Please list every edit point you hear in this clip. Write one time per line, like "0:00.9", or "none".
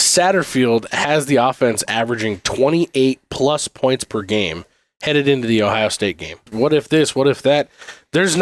0:06.4